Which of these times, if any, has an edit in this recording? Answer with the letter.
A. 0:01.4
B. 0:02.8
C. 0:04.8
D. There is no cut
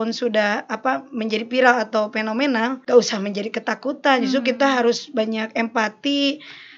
B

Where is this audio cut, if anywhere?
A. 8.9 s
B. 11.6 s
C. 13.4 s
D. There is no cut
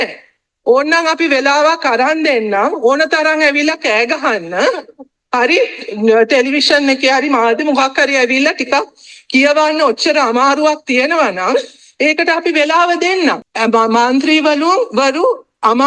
C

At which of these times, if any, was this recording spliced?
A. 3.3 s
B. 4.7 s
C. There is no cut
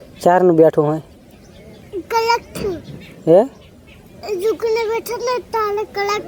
C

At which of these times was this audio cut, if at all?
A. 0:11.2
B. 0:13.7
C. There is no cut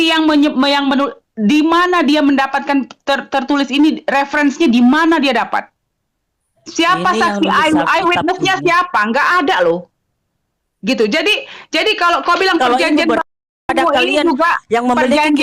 B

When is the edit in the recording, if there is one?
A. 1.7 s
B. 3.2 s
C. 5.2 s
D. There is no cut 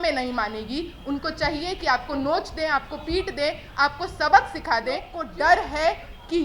C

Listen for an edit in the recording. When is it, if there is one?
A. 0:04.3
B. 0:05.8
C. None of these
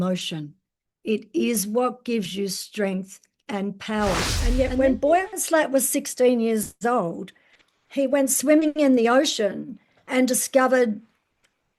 A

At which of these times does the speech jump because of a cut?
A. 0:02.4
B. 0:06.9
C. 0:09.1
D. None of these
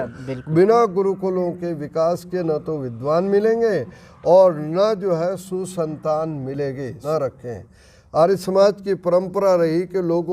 B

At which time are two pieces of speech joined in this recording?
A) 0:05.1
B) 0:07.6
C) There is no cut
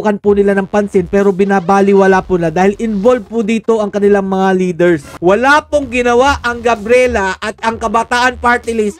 A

